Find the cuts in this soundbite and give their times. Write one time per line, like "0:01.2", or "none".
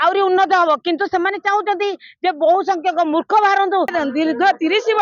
0:03.9